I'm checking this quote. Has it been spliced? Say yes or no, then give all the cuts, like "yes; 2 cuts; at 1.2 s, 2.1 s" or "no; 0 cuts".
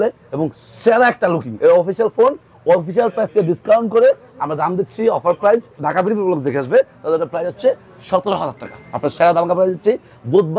yes; 1 cut; at 5.9 s